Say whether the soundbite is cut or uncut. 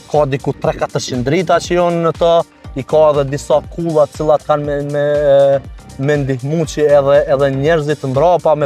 uncut